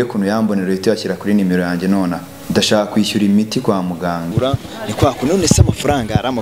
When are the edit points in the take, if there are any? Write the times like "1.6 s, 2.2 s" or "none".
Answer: 2.3 s, 4.3 s

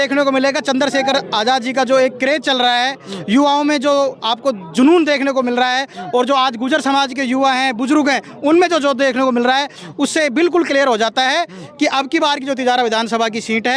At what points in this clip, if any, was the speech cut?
none

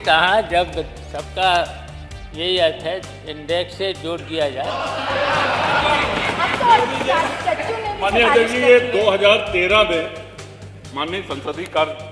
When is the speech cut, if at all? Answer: none

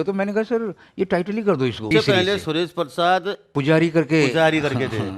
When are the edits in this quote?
1.9 s, 3.5 s

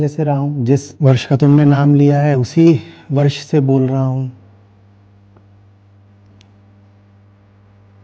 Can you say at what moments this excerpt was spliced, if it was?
0.9 s

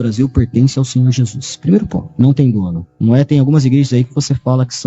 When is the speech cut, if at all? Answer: 3.1 s

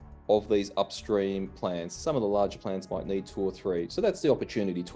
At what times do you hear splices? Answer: none

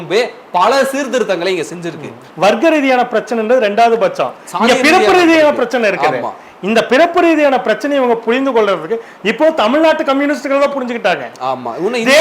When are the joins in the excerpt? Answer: 2.2 s

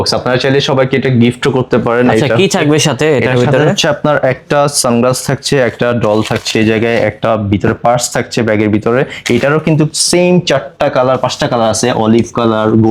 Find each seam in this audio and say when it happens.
none

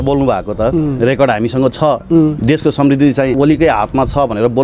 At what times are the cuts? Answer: 2.4 s, 3.3 s

